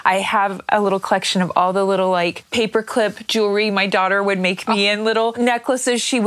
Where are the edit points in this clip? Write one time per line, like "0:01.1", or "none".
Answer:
0:05.3